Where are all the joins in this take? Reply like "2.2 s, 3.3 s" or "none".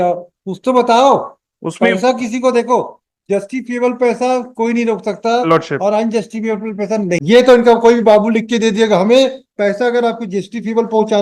7.2 s